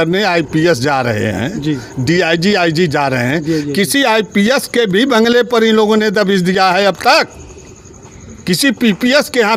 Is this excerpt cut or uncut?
uncut